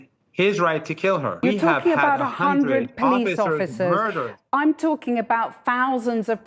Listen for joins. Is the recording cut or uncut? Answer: cut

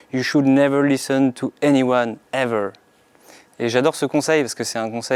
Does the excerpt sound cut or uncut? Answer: uncut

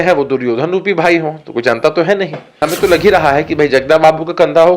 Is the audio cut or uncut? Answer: cut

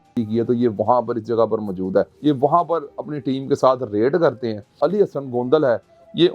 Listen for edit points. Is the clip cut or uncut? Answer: cut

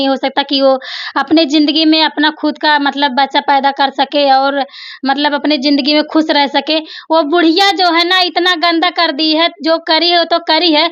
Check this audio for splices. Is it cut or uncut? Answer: uncut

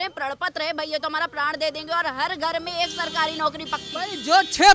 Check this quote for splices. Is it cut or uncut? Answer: uncut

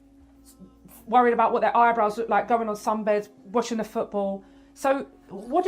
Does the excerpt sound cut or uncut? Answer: cut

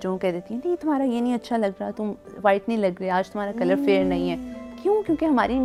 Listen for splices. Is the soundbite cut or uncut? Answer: uncut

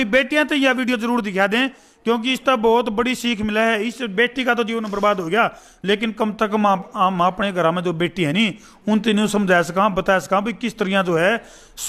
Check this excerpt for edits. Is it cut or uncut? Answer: uncut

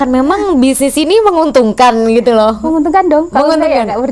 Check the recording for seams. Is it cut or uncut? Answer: uncut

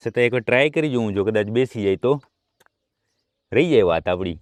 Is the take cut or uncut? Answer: uncut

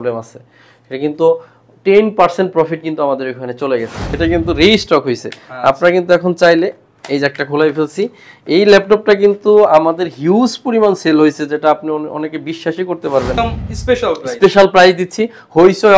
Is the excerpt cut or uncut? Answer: cut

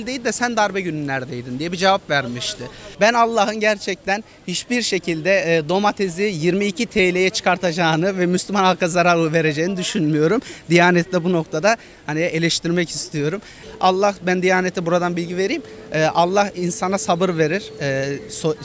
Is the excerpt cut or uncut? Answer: cut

